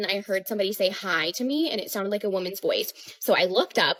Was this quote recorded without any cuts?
yes; 0 cuts

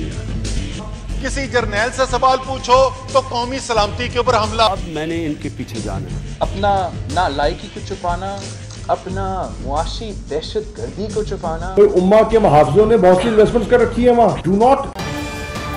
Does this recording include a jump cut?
yes; 1 cut; at 14.9 s

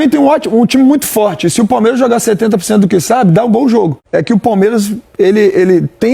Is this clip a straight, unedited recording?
no; 1 cut; at 4.0 s

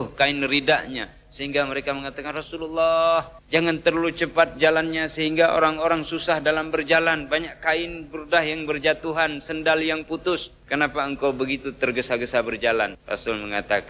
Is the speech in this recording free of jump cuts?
no; 3 cuts; at 3.4 s, 10.5 s, 13.0 s

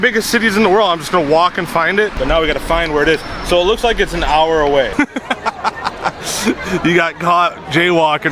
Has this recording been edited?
yes; 2 cuts; at 2.2 s, 4.9 s

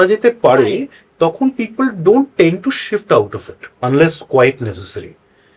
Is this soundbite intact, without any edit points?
yes; 0 cuts

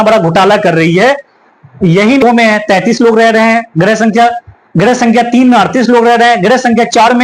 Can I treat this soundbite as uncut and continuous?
no; 1 cut; at 2.2 s

